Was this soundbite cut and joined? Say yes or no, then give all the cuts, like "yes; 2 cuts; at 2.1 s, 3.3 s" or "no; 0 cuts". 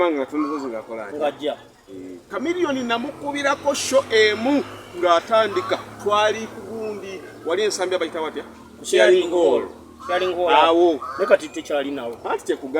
yes; 1 cut; at 2.3 s